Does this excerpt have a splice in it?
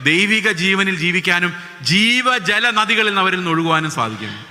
no; 0 cuts

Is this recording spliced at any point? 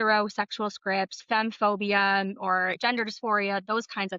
yes; 2 cuts; at 1.2 s, 2.8 s

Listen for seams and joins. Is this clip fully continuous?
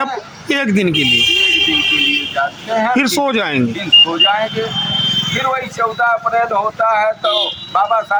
yes; 0 cuts

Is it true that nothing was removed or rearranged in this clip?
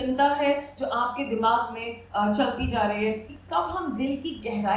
no; 1 cut; at 3.3 s

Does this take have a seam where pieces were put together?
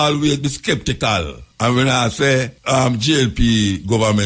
yes; 2 cuts; at 1.4 s, 2.6 s

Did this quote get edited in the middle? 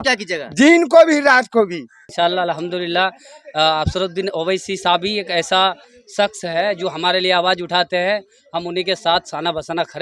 yes; 1 cut; at 2.1 s

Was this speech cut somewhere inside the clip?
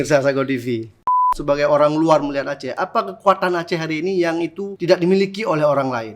yes; 2 cuts; at 1.3 s, 4.7 s

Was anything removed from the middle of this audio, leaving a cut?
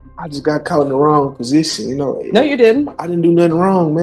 no; 0 cuts

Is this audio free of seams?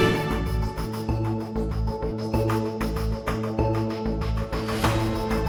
yes; 0 cuts

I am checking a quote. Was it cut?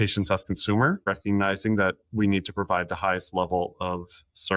yes; 1 cut; at 1.0 s

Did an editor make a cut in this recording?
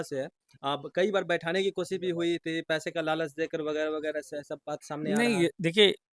no; 0 cuts

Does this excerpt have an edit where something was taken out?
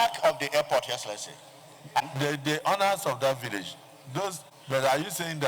yes; 1 cut; at 4.5 s

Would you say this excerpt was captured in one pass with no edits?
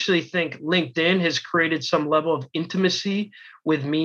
yes; 0 cuts

